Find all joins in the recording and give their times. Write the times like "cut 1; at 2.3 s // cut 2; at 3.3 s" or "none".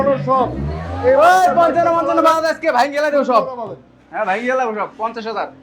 none